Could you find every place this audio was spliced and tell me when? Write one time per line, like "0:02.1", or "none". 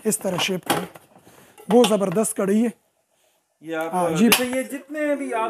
0:04.3